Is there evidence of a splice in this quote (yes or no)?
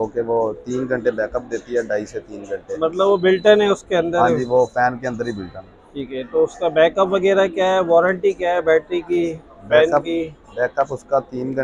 no